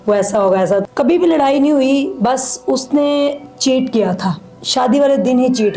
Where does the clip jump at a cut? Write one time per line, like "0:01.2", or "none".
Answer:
0:00.8
0:04.6